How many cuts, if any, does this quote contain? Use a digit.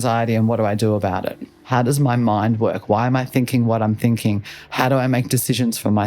1